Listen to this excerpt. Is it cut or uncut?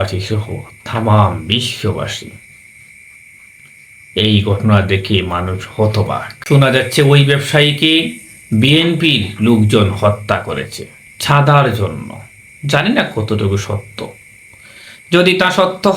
cut